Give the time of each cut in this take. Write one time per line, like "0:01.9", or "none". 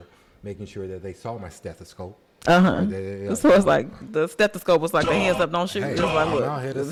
none

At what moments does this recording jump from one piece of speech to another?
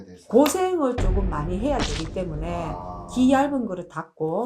none

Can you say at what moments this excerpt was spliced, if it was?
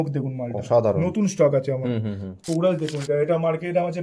0:02.4

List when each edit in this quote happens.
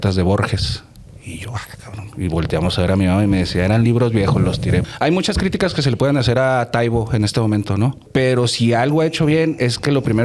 0:04.9
0:08.0

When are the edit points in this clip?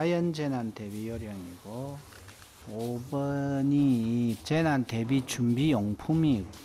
0:02.6

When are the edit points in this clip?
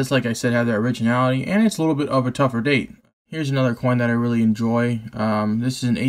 0:03.1

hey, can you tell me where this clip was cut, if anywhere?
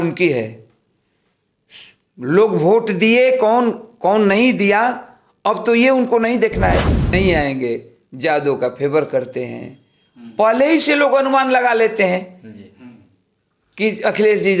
0:07.0

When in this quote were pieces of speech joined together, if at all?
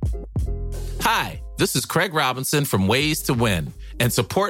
0:00.9

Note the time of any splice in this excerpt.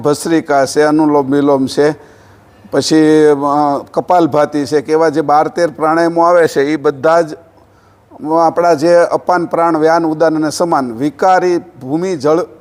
none

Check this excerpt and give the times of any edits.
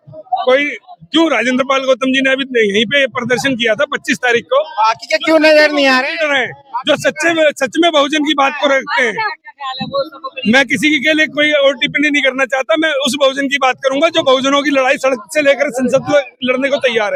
none

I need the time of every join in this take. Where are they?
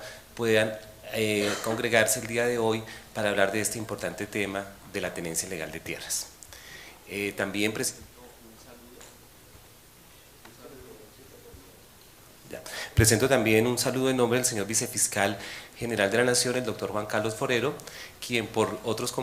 none

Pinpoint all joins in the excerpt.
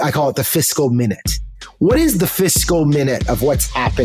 none

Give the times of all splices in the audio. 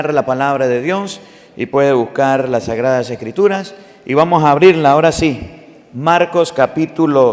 none

